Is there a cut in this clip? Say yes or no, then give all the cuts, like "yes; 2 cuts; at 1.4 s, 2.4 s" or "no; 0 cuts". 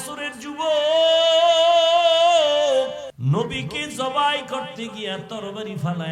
yes; 1 cut; at 3.1 s